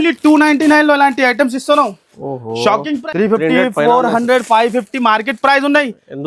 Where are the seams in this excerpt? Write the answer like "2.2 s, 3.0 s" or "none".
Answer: 3.0 s